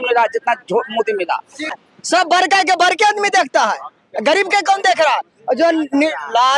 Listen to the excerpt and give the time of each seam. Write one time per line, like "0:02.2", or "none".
0:01.7